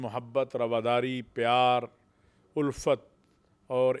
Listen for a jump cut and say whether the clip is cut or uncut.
uncut